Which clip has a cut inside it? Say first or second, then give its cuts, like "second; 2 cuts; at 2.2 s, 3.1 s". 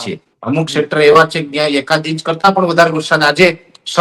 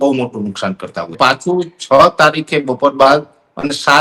second; 1 cut; at 1.1 s